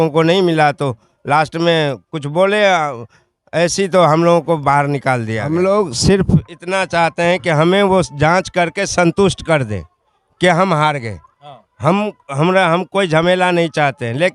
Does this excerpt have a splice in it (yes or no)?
yes